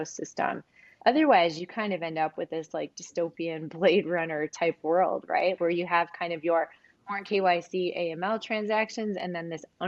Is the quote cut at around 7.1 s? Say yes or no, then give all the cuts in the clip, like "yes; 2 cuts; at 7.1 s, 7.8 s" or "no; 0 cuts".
no; 2 cuts; at 0.9 s, 5.6 s